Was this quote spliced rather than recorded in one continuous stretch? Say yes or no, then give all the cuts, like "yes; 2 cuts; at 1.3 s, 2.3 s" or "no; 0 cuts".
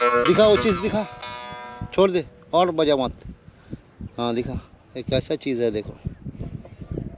no; 0 cuts